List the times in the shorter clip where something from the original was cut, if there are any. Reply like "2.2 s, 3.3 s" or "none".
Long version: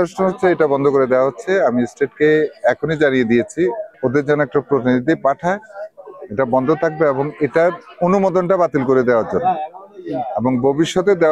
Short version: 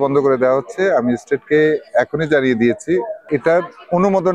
3.2 s